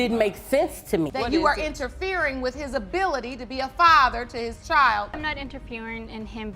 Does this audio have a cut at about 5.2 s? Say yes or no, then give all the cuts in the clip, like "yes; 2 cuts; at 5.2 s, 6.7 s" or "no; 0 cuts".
yes; 2 cuts; at 1.1 s, 5.2 s